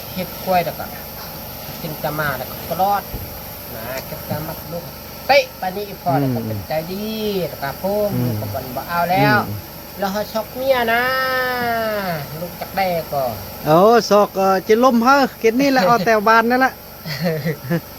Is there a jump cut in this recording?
no; 0 cuts

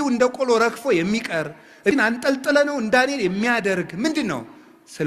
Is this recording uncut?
no; 1 cut; at 1.9 s

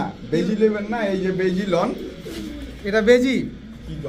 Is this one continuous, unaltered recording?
yes; 0 cuts

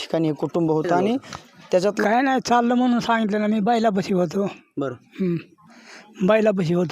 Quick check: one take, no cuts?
no; 1 cut; at 2.0 s

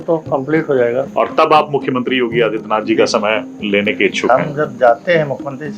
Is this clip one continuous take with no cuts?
no; 1 cut; at 1.1 s

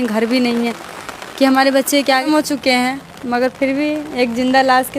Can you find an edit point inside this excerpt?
yes; 1 cut; at 2.2 s

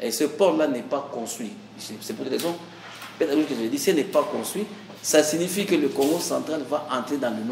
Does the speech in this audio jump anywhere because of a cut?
no; 0 cuts

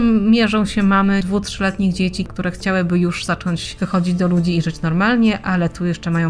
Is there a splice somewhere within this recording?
yes; 3 cuts; at 1.2 s, 2.3 s, 3.7 s

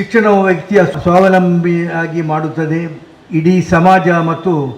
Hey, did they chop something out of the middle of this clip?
yes; 1 cut; at 0.9 s

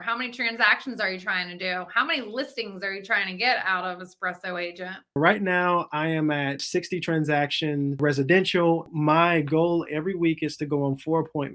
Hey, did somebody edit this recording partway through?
yes; 4 cuts; at 5.2 s, 6.6 s, 8.0 s, 8.9 s

